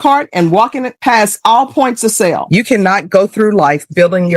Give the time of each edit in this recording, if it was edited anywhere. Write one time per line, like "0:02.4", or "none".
0:02.4